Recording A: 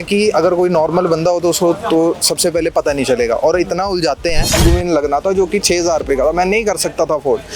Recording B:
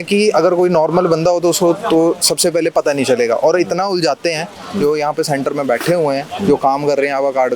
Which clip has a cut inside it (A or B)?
A